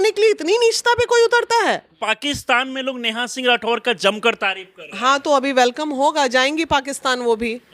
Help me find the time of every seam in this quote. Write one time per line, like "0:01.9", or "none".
0:02.0

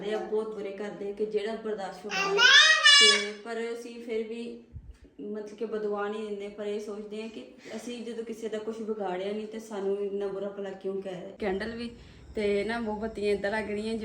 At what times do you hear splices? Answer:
0:11.4

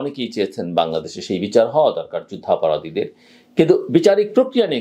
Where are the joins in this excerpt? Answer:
none

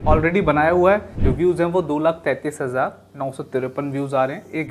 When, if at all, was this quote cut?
0:01.2

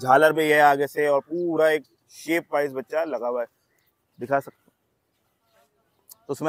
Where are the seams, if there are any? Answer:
none

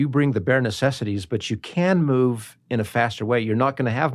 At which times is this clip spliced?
none

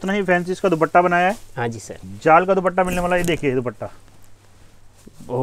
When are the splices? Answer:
none

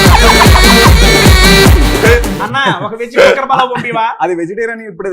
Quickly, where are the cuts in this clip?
0:02.4

